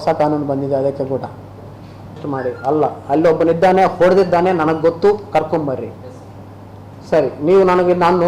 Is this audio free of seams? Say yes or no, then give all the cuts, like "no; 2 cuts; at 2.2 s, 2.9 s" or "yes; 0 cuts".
no; 1 cut; at 2.2 s